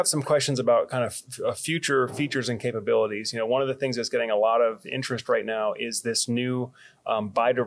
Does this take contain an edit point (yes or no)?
no